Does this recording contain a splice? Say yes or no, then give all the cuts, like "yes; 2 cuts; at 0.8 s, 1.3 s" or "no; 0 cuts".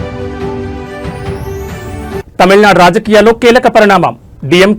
yes; 1 cut; at 1.9 s